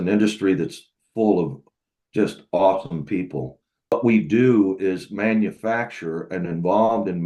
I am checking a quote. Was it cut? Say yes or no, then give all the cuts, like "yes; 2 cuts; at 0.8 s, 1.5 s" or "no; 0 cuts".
yes; 1 cut; at 3.9 s